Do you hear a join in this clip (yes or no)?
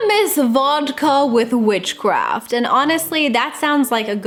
no